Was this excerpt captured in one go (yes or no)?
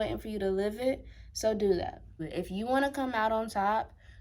no